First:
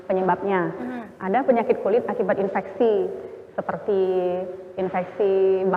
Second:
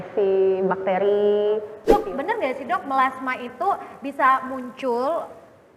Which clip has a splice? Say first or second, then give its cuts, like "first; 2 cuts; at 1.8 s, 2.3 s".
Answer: second; 1 cut; at 1.9 s